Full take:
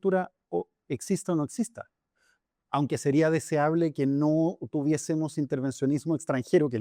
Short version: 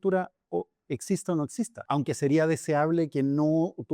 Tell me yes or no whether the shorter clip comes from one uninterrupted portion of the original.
no